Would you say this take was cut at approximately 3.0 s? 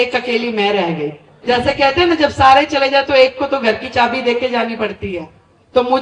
no; 1 cut; at 1.3 s

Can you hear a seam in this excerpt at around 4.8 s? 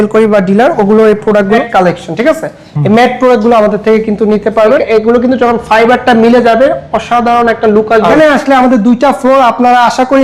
yes; 3 cuts; at 1.6 s, 4.8 s, 8.1 s

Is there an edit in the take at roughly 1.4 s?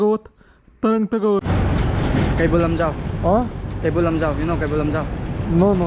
yes; 1 cut; at 1.4 s

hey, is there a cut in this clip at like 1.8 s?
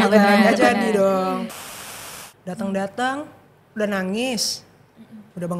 yes; 1 cut; at 1.8 s

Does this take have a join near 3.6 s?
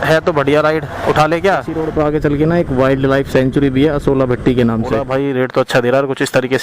no; 2 cuts; at 1.8 s, 5.0 s

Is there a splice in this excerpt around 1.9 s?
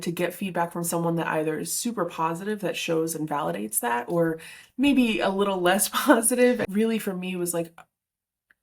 no; 1 cut; at 6.7 s

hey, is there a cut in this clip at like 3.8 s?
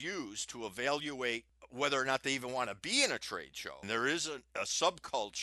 yes; 3 cuts; at 1.6 s, 3.8 s, 4.5 s

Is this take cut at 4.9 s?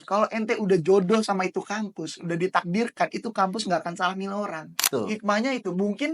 yes; 1 cut; at 4.9 s

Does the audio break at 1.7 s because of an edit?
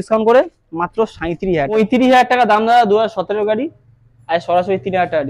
yes; 1 cut; at 1.7 s

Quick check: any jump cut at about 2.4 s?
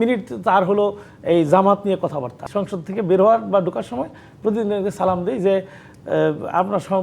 yes; 1 cut; at 2.4 s

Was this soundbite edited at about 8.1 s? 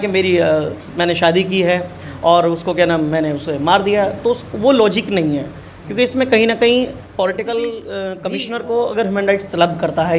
yes; 1 cut; at 8.1 s

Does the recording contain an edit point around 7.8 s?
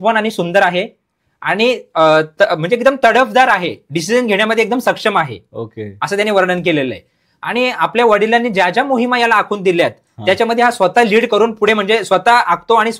no; 0 cuts

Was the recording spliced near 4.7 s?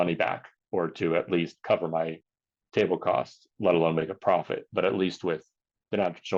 no; 0 cuts

